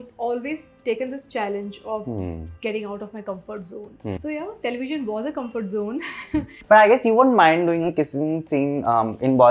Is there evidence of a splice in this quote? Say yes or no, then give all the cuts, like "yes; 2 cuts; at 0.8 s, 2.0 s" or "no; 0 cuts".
yes; 2 cuts; at 4.2 s, 6.5 s